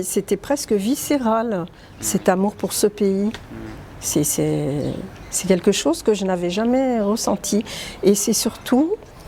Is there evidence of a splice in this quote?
no; 0 cuts

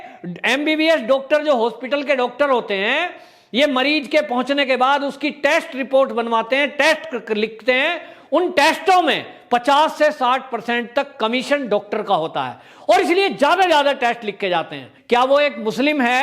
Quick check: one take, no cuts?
no; 1 cut; at 14.9 s

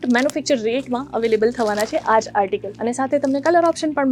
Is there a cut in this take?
yes; 1 cut; at 2.7 s

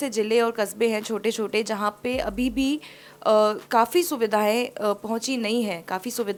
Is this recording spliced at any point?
no; 0 cuts

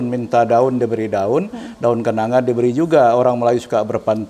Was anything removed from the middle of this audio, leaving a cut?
no; 0 cuts

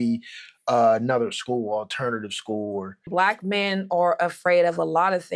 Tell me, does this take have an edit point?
yes; 1 cut; at 3.1 s

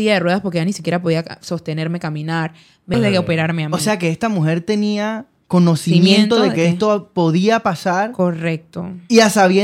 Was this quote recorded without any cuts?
no; 1 cut; at 2.9 s

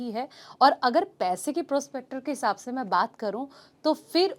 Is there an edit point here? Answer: no; 0 cuts

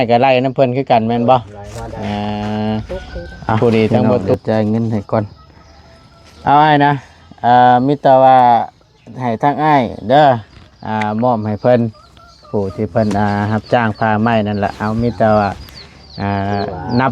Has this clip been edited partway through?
yes; 1 cut; at 4.3 s

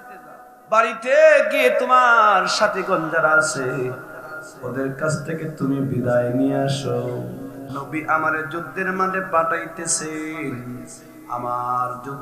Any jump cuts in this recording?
yes; 1 cut; at 7.7 s

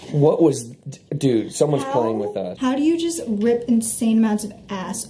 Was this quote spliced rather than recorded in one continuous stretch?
yes; 1 cut; at 2.5 s

